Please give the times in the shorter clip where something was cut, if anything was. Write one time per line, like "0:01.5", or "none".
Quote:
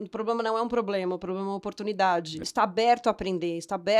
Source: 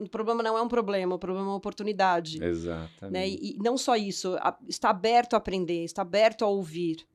0:02.4